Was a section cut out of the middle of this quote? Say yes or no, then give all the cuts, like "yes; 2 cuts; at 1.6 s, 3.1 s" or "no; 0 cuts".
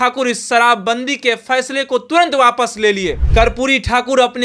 yes; 1 cut; at 3.2 s